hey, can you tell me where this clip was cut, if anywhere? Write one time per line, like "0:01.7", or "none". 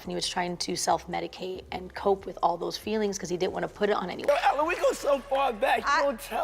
0:04.1